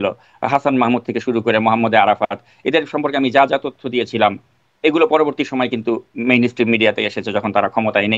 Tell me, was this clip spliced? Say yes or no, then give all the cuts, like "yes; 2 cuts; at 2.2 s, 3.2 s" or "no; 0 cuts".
no; 0 cuts